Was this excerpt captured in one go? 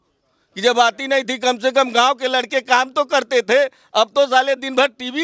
yes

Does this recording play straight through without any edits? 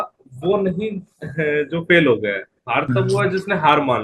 yes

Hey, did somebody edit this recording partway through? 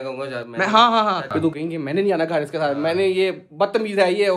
yes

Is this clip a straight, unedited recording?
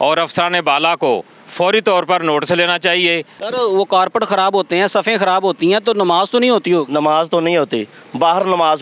no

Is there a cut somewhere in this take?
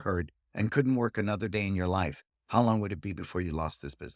no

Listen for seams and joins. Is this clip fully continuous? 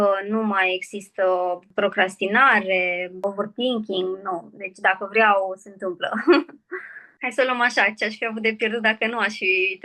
no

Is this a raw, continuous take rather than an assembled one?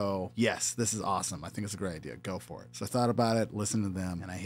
yes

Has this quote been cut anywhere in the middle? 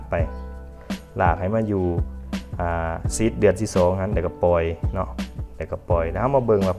no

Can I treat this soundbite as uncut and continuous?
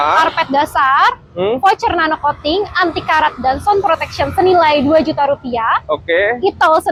yes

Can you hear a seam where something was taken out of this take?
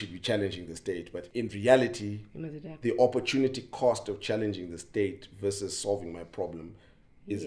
yes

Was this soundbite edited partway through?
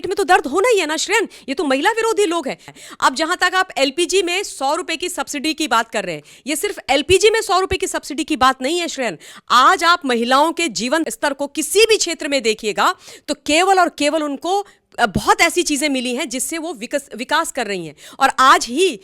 yes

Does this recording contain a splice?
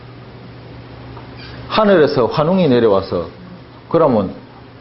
no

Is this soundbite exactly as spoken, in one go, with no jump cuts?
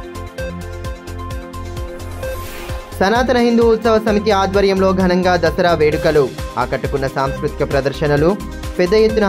yes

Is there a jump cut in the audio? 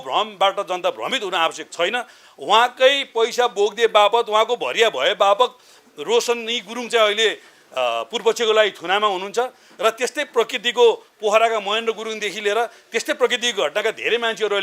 no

